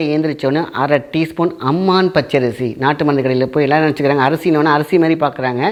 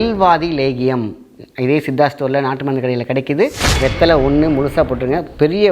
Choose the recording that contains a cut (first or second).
second